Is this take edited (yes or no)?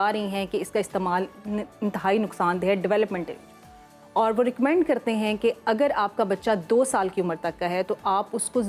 no